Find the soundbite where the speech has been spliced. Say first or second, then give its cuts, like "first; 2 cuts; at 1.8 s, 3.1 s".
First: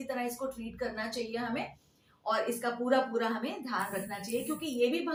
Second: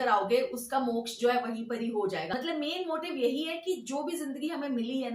second; 1 cut; at 2.3 s